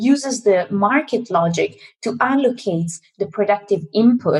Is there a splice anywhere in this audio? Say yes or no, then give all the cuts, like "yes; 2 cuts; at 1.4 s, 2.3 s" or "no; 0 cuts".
no; 0 cuts